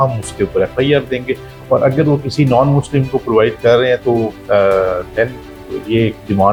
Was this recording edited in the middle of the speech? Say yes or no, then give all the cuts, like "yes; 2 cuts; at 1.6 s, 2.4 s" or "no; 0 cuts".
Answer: no; 0 cuts